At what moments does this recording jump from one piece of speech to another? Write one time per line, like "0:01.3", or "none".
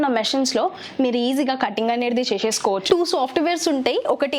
0:02.8